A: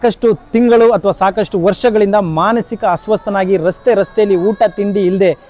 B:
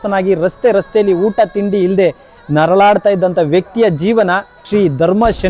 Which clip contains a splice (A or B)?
B